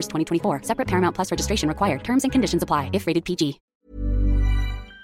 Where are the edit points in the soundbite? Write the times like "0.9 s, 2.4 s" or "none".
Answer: 3.6 s

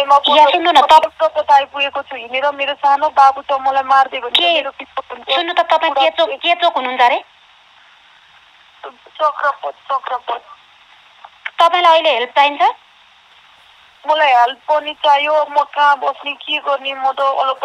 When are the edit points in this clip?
1.0 s

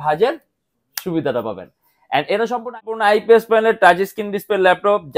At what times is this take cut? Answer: 2.8 s

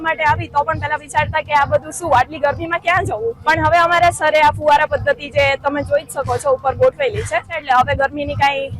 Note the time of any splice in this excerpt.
3.4 s, 7.5 s

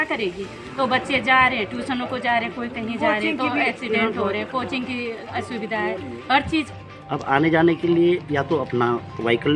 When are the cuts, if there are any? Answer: 6.8 s

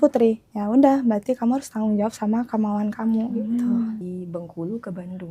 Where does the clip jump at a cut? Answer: 4.0 s

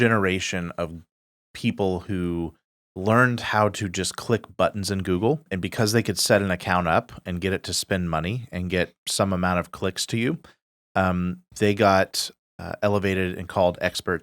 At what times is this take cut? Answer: 5.5 s

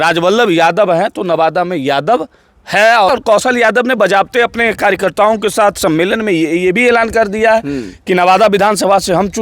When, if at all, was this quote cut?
3.1 s

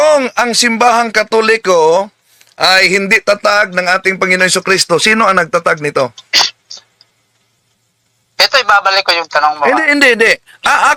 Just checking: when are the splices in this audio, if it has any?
none

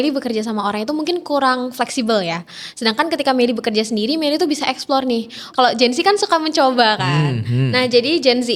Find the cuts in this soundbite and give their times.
5.4 s

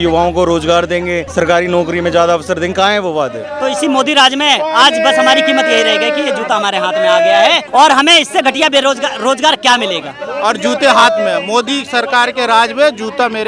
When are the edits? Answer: 1.2 s, 3.5 s, 7.6 s, 10.2 s

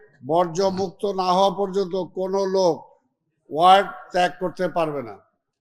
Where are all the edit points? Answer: none

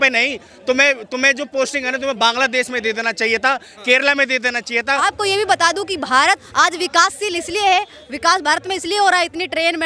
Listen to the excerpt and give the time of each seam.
5.0 s, 6.5 s

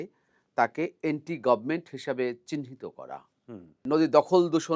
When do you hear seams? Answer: 3.9 s

